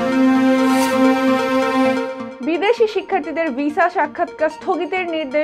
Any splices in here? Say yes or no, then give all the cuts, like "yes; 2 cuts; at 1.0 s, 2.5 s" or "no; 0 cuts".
no; 0 cuts